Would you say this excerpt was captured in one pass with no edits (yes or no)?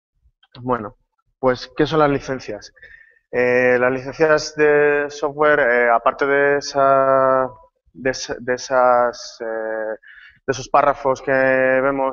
no